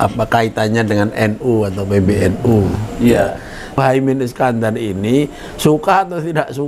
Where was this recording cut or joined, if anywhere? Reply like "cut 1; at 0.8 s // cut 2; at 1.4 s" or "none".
cut 1; at 3.8 s